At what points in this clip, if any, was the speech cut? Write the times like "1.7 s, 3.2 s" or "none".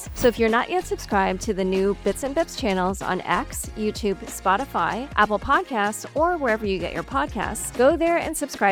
none

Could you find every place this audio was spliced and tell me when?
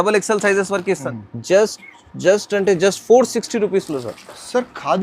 1.0 s

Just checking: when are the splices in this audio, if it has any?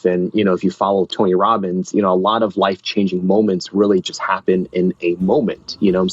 1.1 s

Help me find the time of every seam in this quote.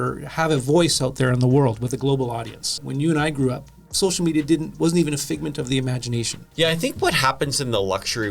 2.7 s, 6.4 s

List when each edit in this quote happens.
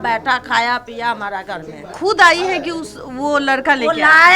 1.9 s

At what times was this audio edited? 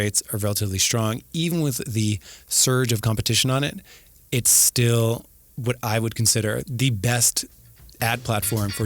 6.7 s

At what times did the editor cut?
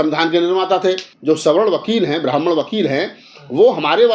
1.1 s

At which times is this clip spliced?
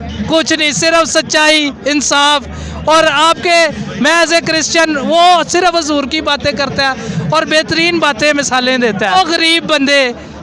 9.1 s

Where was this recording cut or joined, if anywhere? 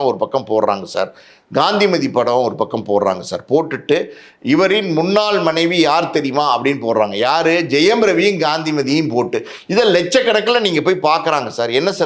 none

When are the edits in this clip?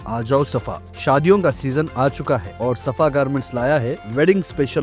none

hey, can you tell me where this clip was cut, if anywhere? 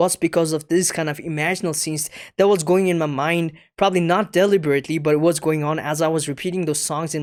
none

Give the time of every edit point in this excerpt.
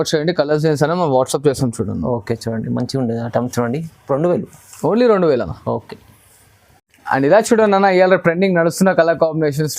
none

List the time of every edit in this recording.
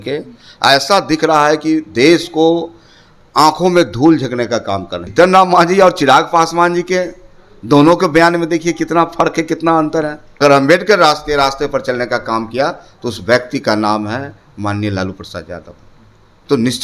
5.0 s, 10.3 s

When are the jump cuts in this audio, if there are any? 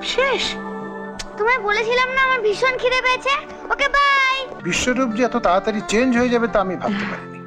4.6 s

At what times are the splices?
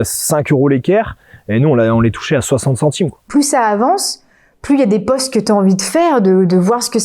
3.2 s

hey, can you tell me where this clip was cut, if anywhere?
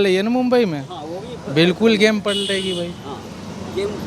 none

